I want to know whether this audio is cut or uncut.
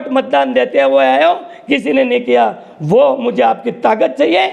uncut